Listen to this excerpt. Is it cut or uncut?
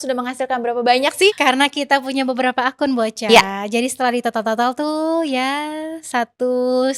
cut